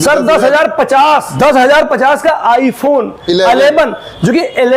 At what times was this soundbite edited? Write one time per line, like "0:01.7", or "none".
0:01.3